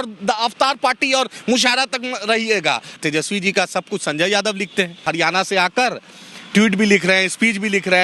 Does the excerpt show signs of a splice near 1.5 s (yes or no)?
no